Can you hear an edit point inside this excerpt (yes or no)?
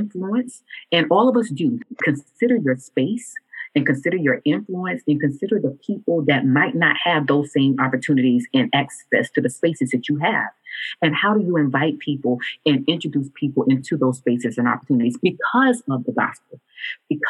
yes